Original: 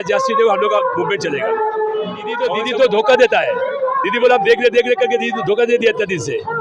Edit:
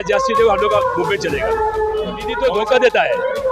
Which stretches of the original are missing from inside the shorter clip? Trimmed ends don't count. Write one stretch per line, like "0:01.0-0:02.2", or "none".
0:02.3-0:02.7